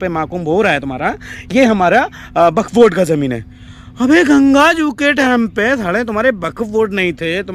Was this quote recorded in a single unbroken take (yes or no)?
yes